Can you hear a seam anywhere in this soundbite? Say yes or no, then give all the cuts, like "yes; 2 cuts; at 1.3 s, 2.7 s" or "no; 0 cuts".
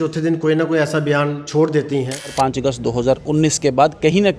yes; 1 cut; at 2.3 s